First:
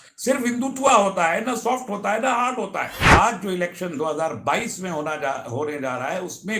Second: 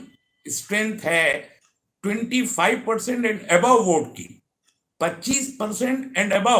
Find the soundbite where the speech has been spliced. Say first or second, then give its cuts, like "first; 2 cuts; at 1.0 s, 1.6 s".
first; 1 cut; at 3.0 s